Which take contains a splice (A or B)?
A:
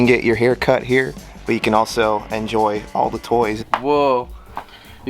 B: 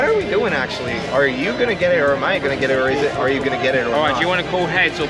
A